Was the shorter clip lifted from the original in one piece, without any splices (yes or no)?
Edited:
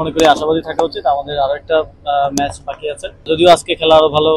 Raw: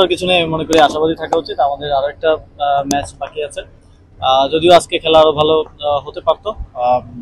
no